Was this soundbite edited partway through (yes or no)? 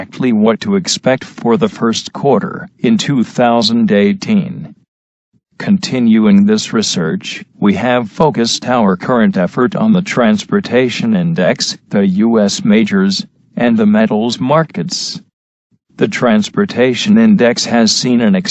yes